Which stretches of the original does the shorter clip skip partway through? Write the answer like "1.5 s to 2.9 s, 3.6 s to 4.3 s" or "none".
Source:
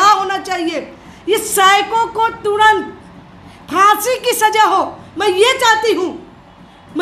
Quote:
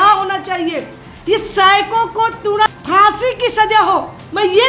2.7 s to 3.5 s